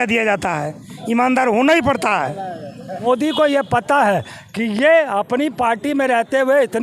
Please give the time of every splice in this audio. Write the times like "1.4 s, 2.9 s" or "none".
2.9 s